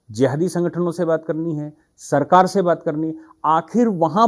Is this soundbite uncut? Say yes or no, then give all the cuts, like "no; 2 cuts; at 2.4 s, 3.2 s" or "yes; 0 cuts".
yes; 0 cuts